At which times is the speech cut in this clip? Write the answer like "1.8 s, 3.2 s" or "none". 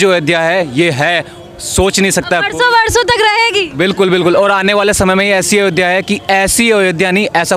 none